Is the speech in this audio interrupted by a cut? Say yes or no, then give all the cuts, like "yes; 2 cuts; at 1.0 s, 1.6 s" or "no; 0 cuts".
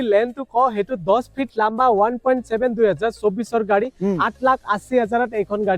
no; 0 cuts